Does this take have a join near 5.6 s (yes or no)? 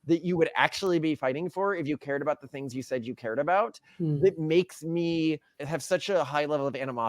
yes